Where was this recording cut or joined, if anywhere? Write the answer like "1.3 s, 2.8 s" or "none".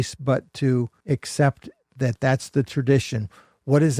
1.0 s